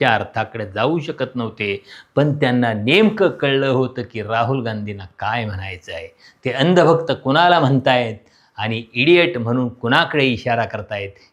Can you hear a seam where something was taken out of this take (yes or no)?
no